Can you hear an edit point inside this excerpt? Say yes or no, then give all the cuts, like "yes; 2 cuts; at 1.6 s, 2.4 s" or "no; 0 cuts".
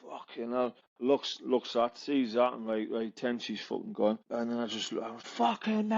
yes; 2 cuts; at 0.9 s, 4.8 s